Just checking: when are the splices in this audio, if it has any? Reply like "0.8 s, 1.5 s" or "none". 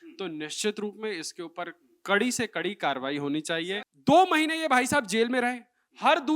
3.8 s